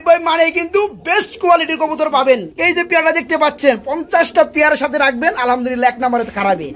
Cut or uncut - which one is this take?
cut